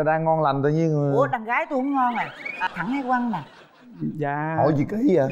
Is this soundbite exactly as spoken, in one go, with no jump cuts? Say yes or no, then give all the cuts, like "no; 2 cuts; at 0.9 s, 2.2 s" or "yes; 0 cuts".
no; 1 cut; at 2.6 s